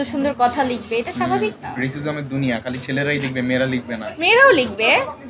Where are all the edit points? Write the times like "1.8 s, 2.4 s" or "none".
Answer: none

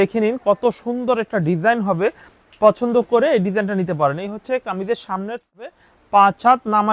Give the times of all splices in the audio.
5.5 s

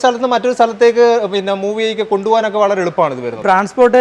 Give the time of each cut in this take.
none

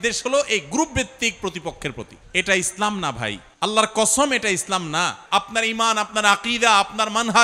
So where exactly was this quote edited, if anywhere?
2.2 s, 3.4 s, 5.2 s

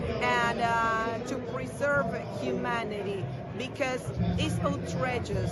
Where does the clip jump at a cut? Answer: none

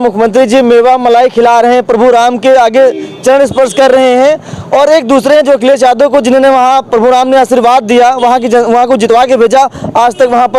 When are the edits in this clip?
none

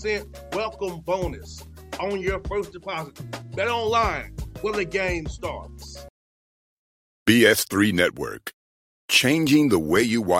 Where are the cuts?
6.0 s

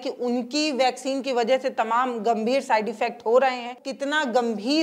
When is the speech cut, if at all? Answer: 3.9 s

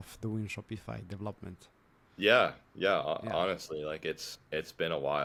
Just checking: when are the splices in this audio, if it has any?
none

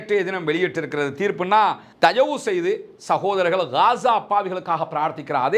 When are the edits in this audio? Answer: 1.9 s

